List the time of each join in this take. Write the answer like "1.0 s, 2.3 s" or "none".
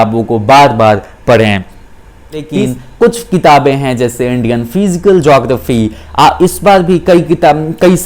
2.5 s